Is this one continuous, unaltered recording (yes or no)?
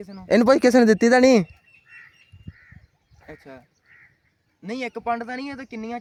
yes